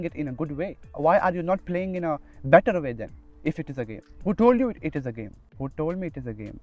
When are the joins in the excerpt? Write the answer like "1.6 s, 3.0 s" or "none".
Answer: 0.9 s, 4.0 s, 5.4 s